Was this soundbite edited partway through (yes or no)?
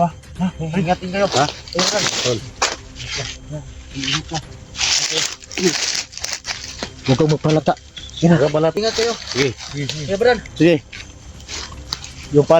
yes